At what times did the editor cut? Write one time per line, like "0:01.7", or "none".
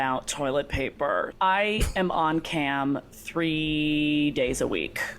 0:01.3

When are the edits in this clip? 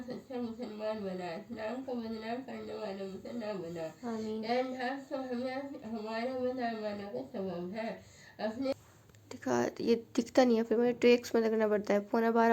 0:08.7

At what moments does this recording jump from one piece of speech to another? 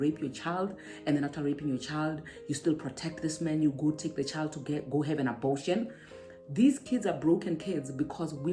none

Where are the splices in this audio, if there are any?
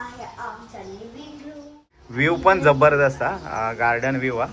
0:02.0

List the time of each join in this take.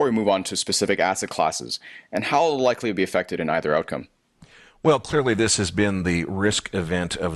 0:01.1

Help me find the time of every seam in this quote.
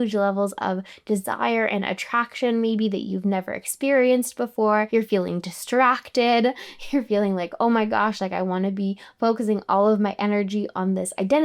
0:04.9

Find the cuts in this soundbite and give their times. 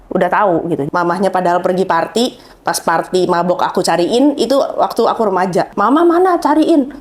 0:00.8
0:05.7

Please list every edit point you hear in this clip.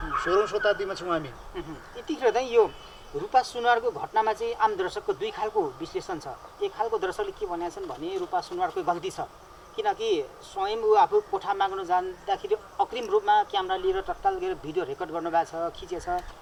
none

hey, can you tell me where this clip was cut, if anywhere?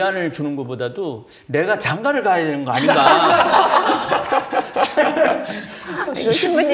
none

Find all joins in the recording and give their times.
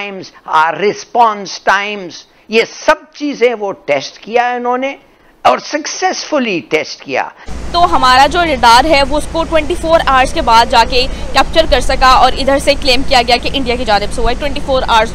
0:07.3

